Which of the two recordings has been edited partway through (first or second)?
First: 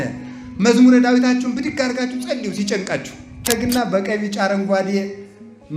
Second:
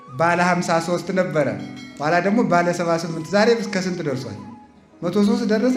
first